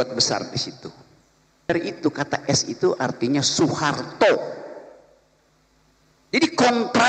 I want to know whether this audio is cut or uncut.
cut